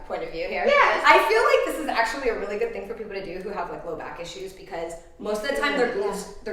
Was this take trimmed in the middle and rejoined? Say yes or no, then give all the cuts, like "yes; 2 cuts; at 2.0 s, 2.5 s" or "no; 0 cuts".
no; 0 cuts